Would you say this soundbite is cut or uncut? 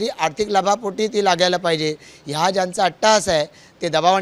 uncut